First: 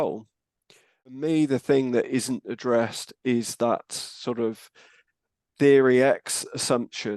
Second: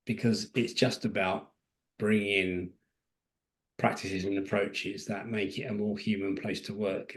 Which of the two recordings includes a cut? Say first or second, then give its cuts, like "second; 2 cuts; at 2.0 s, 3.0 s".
first; 1 cut; at 1.2 s